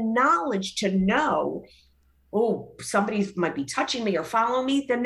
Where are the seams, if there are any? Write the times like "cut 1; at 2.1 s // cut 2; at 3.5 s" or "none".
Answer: none